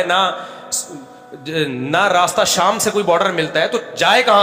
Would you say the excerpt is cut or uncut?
uncut